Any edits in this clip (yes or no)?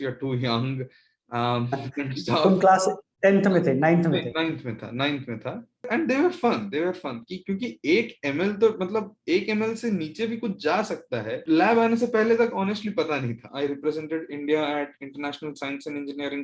yes